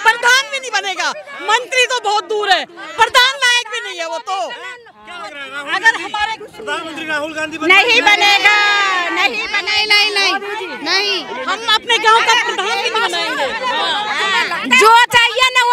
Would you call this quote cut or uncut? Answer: uncut